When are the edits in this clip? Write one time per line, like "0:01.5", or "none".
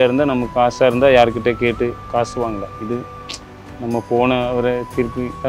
none